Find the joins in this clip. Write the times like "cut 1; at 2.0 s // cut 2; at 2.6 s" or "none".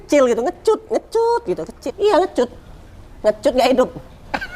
cut 1; at 1.9 s